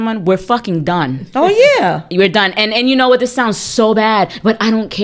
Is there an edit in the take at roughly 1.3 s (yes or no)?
no